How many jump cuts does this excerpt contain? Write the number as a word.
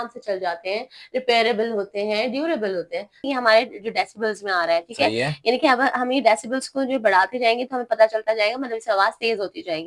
one